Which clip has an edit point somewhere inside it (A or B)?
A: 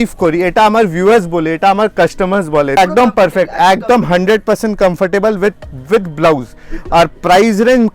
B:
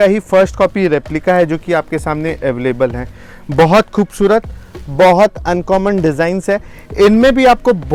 A